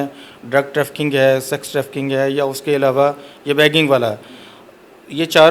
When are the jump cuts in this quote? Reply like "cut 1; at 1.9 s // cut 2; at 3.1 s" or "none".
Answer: none

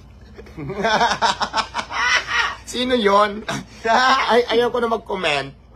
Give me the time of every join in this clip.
none

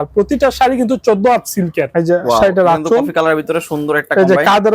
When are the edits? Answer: cut 1; at 1.8 s

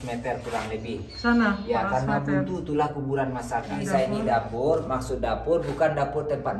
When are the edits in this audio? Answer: cut 1; at 3.8 s

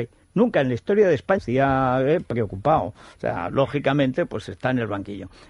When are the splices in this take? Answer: none

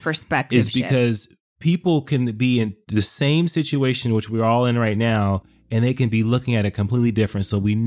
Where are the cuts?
none

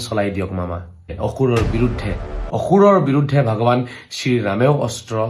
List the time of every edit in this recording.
cut 1; at 1.1 s // cut 2; at 2.4 s

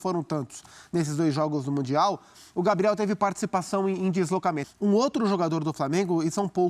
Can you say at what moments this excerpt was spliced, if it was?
cut 1; at 4.6 s

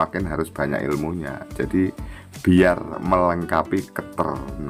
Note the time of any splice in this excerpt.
none

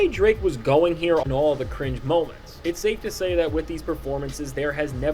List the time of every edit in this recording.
cut 1; at 1.2 s

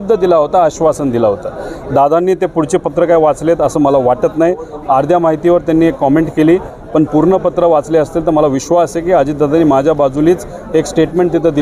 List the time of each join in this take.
none

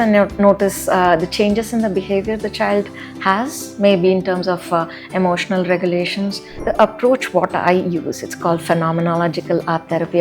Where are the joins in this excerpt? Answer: cut 1; at 6.5 s

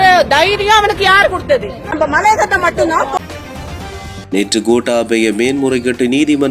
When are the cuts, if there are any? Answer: cut 1; at 3.1 s

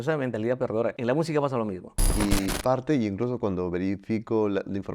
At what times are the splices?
cut 1; at 1.0 s // cut 2; at 2.1 s

